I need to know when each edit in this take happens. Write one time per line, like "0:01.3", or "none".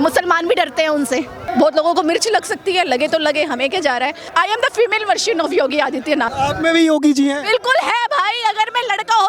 0:01.4
0:04.2
0:06.3